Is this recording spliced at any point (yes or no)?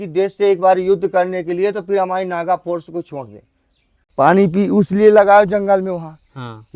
yes